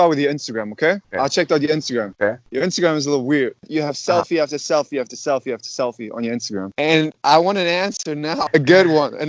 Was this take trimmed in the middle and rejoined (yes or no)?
yes